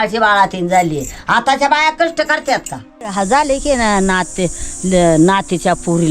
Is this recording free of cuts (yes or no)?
no